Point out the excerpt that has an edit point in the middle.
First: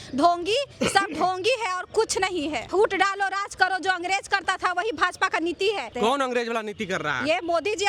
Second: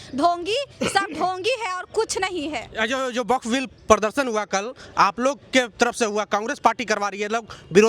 first; 2 cuts; at 2.6 s, 5.9 s

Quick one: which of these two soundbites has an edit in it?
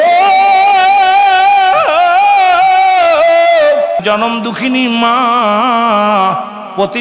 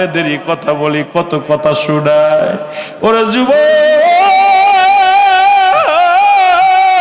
first; 1 cut; at 4.0 s

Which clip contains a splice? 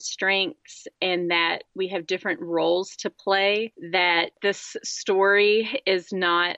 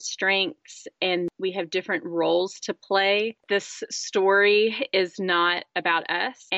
second; 2 cuts; at 1.3 s, 3.4 s

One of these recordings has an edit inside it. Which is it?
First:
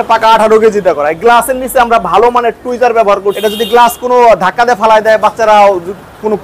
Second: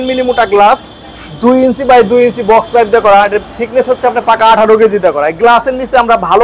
first; 1 cut; at 3.4 s

